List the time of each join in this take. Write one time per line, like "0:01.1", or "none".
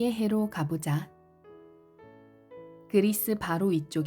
0:01.2
0:02.9